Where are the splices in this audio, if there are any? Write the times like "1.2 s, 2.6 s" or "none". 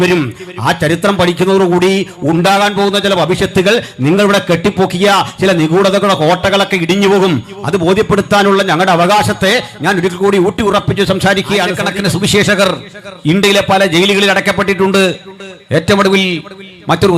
11.8 s